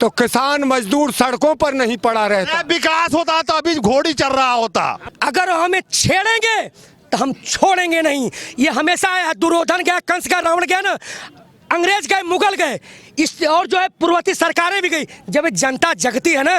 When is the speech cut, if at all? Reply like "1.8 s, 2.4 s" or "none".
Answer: 5.0 s